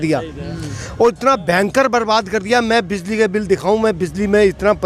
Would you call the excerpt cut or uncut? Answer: uncut